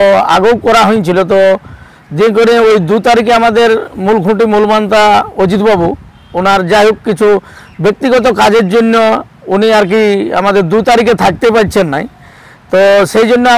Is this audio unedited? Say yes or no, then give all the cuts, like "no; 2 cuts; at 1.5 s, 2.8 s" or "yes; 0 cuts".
yes; 0 cuts